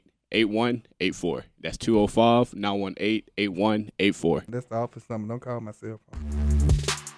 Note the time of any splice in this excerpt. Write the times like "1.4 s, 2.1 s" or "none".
6.2 s